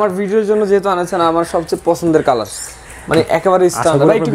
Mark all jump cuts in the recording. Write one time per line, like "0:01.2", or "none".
none